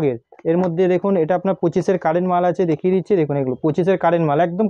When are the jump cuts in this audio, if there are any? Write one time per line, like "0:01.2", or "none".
none

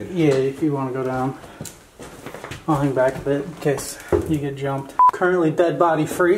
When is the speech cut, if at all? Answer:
0:05.0

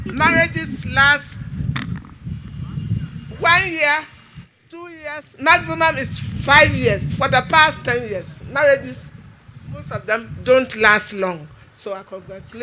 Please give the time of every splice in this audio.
none

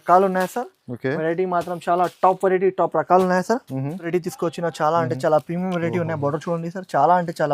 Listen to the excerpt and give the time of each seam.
0:04.0

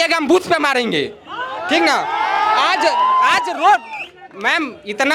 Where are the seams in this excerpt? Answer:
none

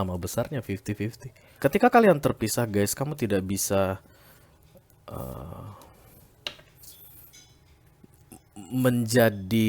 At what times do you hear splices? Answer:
0:01.5

